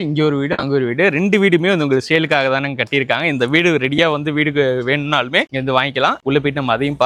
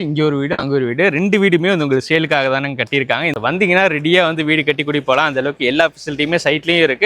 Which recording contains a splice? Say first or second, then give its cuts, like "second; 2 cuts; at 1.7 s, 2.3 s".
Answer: second; 1 cut; at 3.3 s